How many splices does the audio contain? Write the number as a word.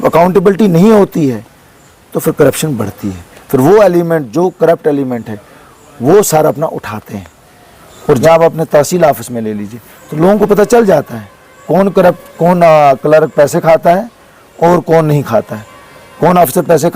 one